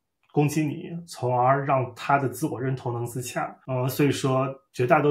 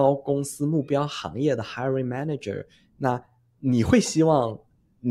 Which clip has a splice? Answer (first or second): first